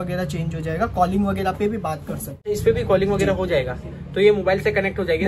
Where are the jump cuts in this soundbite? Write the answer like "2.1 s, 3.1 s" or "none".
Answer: 2.5 s